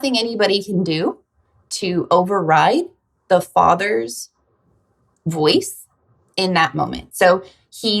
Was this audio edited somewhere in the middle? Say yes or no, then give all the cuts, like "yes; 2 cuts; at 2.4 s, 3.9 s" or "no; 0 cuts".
no; 0 cuts